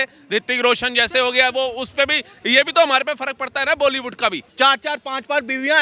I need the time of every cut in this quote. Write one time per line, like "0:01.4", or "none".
0:04.4